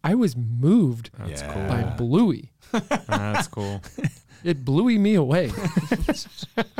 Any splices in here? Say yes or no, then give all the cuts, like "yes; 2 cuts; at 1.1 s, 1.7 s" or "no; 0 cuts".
no; 0 cuts